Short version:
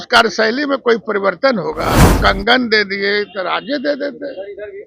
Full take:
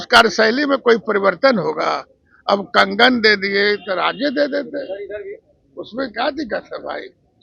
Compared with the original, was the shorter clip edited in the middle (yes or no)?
yes